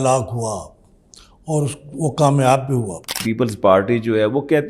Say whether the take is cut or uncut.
cut